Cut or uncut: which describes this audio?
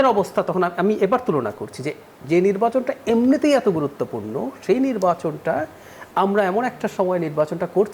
uncut